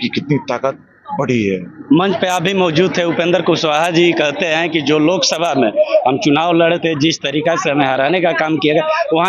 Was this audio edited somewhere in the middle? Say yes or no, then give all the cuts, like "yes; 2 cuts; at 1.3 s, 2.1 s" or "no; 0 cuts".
no; 0 cuts